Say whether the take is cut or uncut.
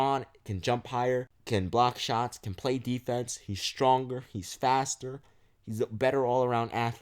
cut